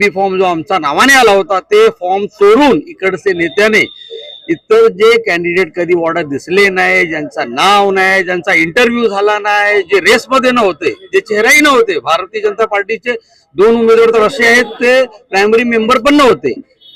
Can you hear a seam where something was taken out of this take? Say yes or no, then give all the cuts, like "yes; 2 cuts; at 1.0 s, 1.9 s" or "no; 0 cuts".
no; 0 cuts